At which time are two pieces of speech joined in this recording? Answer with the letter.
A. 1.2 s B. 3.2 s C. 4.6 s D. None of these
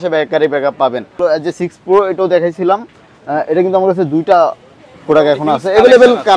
A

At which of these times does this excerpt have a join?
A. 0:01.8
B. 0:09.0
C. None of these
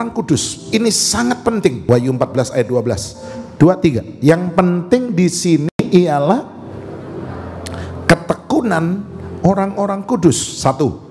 A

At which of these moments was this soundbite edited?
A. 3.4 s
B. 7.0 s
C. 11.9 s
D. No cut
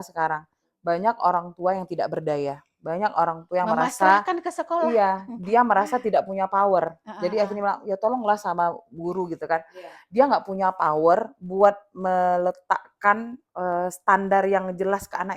D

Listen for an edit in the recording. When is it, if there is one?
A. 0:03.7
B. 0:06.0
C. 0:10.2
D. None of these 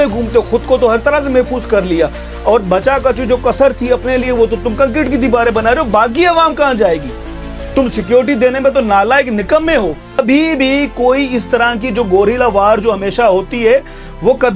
C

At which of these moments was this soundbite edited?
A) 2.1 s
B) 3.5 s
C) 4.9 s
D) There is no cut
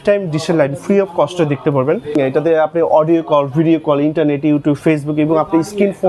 A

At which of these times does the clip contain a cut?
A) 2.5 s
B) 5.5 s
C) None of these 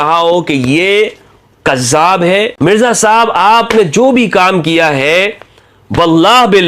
A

